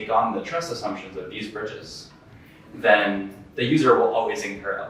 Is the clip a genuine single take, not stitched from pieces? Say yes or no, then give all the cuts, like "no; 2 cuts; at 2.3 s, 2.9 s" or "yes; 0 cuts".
yes; 0 cuts